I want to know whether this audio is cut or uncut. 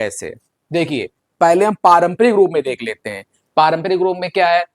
uncut